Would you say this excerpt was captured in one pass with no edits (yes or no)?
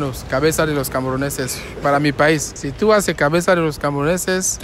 yes